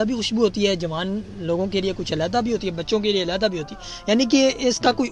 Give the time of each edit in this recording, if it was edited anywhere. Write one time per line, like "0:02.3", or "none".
none